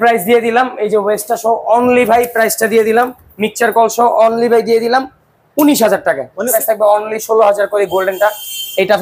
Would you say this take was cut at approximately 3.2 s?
no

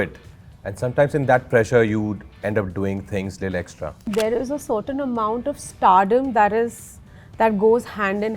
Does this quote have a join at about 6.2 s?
no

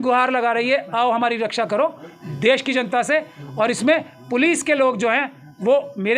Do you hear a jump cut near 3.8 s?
no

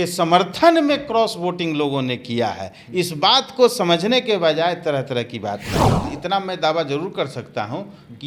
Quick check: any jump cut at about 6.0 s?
yes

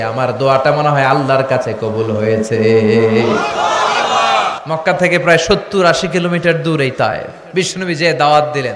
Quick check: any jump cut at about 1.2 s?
no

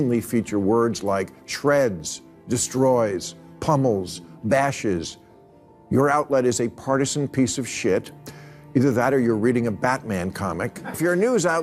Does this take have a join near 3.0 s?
no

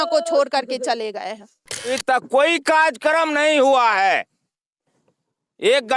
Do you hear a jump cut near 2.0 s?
yes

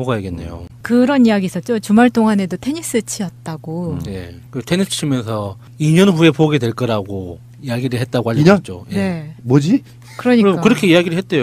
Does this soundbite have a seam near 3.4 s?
no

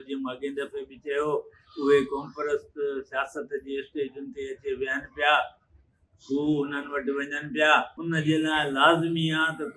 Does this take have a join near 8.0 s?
yes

